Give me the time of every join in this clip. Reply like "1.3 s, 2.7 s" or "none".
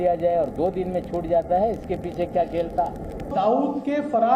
3.2 s